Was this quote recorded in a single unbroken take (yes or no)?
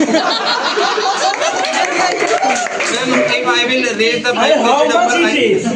yes